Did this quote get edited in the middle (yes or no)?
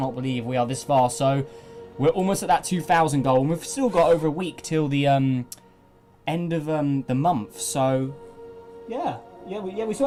no